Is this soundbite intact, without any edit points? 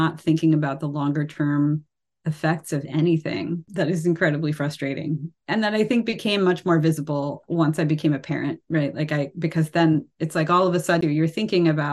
no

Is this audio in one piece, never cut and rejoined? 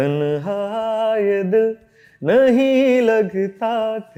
yes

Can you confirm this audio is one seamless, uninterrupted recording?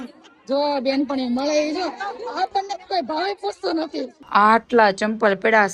no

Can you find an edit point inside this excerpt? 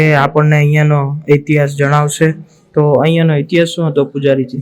no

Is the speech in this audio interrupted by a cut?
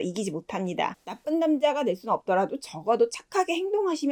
no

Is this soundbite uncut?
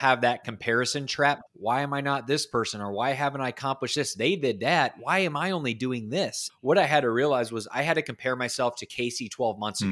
no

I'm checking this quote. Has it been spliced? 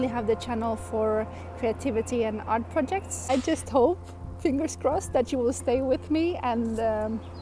yes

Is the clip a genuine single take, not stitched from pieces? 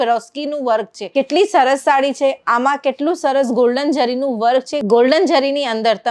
no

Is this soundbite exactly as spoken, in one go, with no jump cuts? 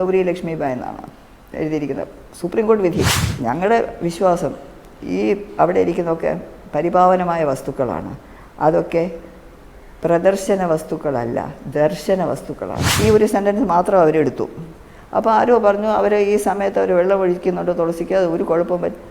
no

